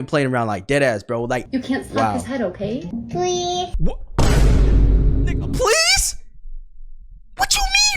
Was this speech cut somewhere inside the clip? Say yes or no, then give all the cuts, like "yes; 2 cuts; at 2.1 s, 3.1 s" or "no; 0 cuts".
yes; 2 cuts; at 1.4 s, 2.9 s